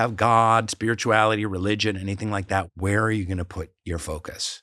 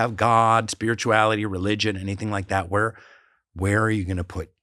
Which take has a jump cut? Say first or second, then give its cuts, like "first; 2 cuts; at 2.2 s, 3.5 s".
first; 1 cut; at 2.7 s